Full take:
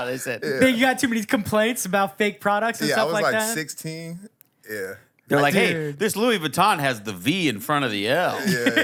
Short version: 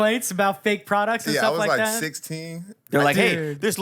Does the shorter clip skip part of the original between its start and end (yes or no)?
yes